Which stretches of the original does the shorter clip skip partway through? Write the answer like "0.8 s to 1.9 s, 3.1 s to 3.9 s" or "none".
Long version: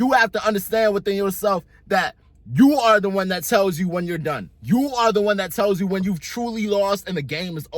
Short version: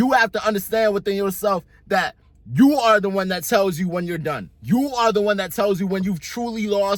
none